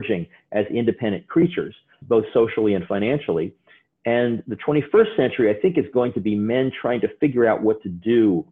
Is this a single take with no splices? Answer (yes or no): no